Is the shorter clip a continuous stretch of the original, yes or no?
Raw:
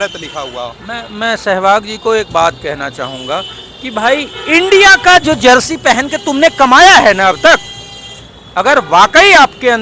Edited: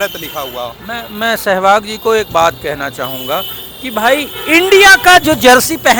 yes